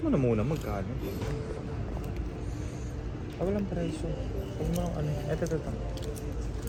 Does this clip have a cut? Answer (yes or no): no